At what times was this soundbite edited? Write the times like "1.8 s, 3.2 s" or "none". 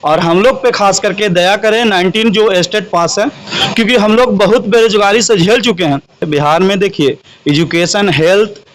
6.3 s